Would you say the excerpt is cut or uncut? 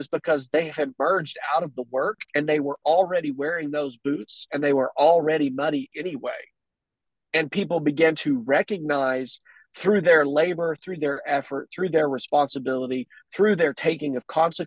uncut